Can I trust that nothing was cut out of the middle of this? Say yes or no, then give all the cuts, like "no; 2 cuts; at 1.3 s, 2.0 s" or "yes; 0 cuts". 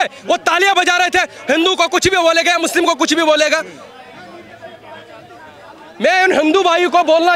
yes; 0 cuts